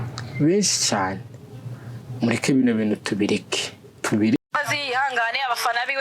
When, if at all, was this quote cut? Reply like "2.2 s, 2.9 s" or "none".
4.4 s